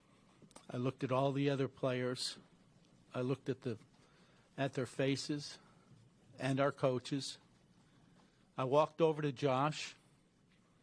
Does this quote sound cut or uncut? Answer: uncut